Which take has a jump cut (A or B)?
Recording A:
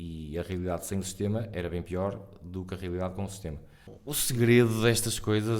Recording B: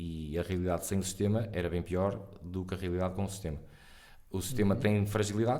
A